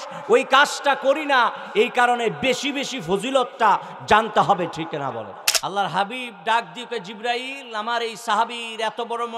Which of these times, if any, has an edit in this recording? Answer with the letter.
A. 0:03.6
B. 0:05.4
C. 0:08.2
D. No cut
B